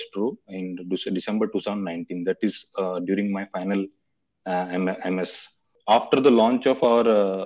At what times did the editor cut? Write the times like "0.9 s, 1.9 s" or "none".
5.7 s